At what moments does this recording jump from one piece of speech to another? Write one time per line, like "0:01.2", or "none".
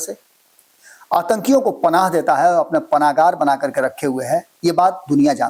none